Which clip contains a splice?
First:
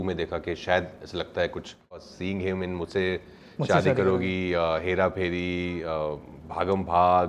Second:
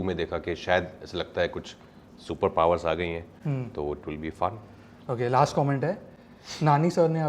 first; 1 cut; at 2.1 s

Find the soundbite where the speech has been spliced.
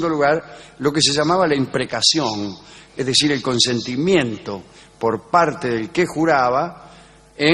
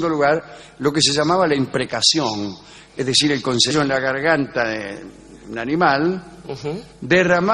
first; 1 cut; at 3.7 s

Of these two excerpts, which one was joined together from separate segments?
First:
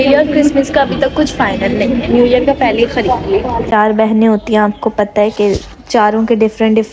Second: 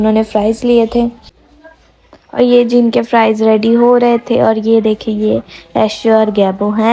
first; 1 cut; at 3.7 s

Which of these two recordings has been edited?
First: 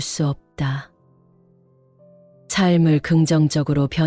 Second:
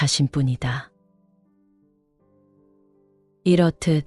first; 2 cuts; at 1.1 s, 2.5 s

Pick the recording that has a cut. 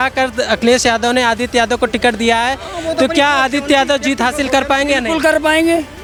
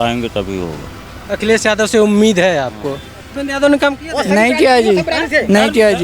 second; 1 cut; at 3.3 s

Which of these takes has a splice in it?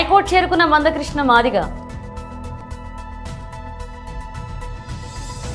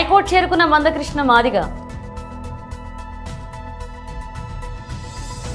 first; 2 cuts; at 2.6 s, 4.6 s

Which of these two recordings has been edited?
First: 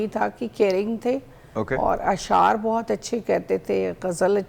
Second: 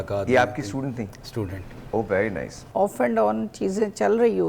second; 1 cut; at 2.5 s

